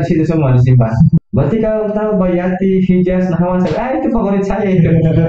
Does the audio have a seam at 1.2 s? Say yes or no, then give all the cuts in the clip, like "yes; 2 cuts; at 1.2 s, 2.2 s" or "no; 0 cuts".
yes; 1 cut; at 1.2 s